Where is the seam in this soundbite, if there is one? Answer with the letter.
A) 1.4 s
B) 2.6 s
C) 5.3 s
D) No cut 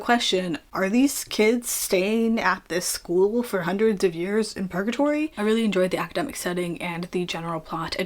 C